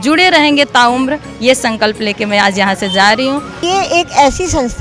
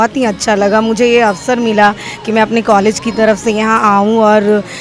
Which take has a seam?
first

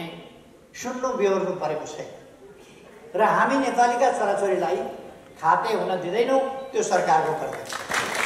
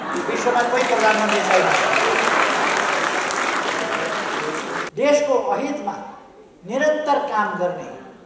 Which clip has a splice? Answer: second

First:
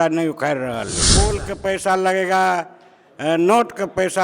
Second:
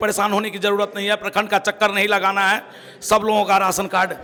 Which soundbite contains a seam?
first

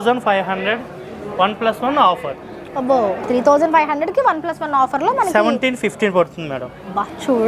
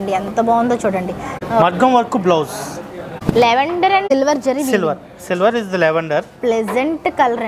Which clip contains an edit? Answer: second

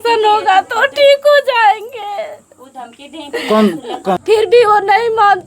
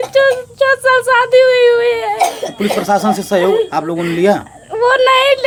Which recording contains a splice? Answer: first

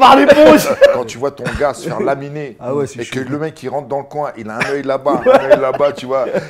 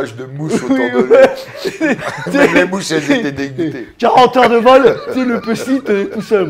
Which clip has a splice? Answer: first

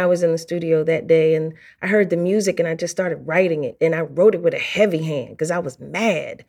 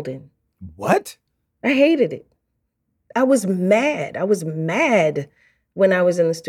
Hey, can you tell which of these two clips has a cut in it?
second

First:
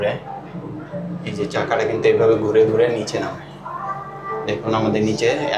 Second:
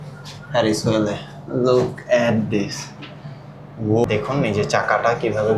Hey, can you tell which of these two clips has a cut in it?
second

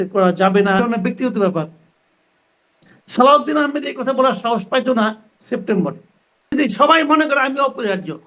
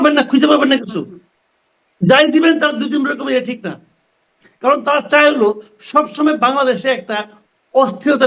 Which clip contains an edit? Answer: first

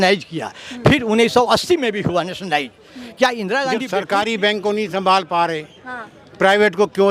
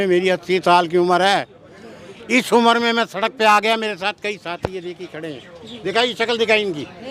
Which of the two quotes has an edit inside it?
first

